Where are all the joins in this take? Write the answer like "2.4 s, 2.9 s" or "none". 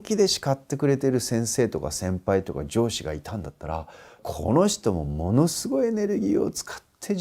1.2 s, 4.2 s